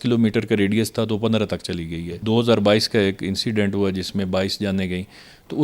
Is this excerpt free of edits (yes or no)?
no